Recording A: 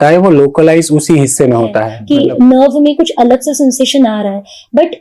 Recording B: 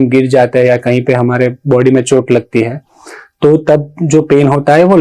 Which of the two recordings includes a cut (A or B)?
A